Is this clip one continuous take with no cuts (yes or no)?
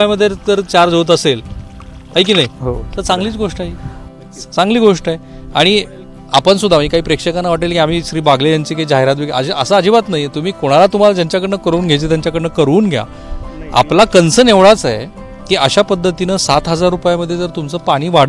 yes